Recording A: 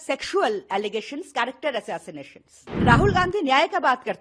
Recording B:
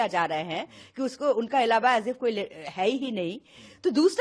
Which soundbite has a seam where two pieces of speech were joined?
A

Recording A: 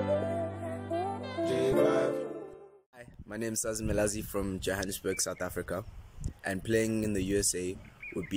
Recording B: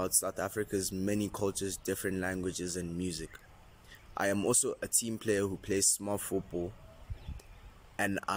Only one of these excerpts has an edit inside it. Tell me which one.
A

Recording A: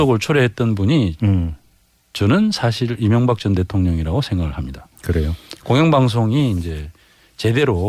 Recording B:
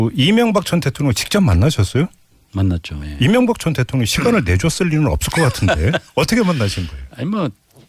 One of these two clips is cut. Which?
A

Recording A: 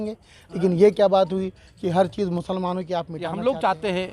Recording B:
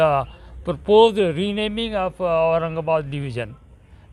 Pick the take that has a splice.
A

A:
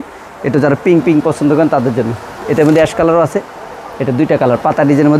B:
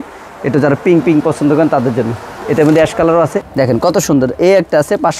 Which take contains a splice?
B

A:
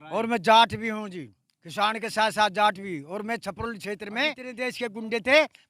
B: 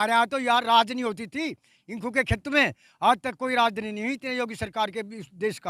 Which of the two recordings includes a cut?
A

